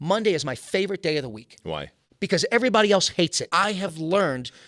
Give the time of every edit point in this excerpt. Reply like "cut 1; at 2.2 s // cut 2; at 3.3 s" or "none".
cut 1; at 3.4 s